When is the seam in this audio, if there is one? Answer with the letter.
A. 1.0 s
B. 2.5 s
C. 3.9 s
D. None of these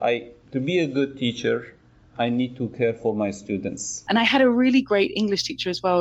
C